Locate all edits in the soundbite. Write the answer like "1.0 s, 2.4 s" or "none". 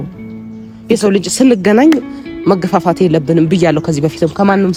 none